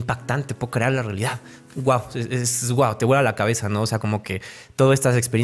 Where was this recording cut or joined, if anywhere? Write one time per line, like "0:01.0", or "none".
none